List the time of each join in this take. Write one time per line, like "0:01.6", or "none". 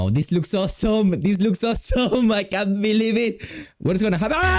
none